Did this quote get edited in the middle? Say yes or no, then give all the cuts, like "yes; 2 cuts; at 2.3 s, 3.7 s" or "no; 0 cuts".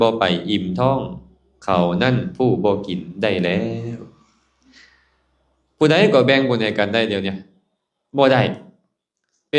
no; 0 cuts